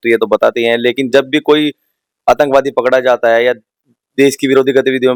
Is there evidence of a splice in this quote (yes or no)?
no